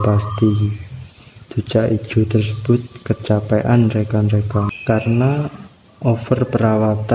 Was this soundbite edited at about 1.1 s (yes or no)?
no